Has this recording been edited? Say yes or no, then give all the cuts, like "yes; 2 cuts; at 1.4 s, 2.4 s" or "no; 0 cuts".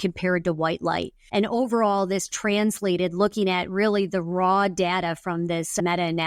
yes; 1 cut; at 1.2 s